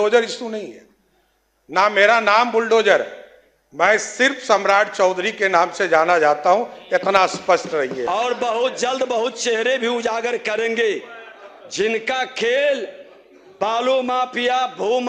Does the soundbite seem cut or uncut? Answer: cut